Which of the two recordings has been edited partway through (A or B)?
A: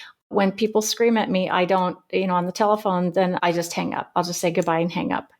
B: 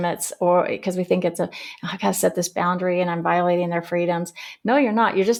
A